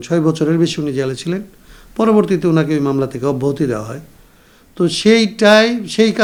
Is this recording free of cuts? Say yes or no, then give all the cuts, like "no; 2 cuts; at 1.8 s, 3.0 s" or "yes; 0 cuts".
yes; 0 cuts